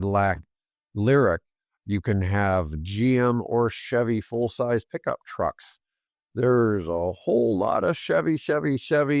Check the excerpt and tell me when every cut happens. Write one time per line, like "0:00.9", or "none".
none